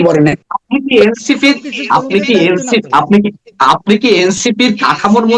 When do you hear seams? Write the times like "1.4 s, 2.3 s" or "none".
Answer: none